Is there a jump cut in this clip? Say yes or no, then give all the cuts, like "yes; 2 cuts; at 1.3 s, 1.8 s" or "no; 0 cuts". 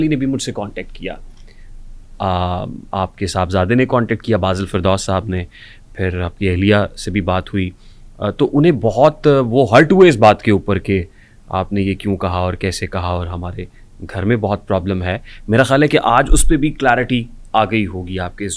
no; 0 cuts